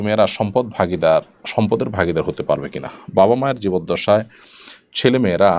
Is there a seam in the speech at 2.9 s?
no; 0 cuts

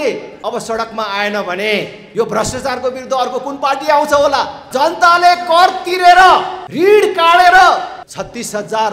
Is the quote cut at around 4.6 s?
no; 0 cuts

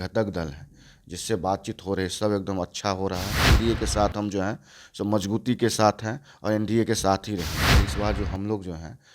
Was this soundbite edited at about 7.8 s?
yes; 2 cuts; at 3.5 s, 7.8 s

